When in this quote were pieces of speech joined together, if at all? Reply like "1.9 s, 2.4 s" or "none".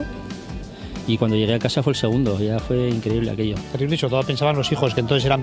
3.6 s